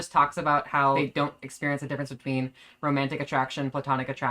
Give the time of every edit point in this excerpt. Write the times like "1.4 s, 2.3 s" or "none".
1.0 s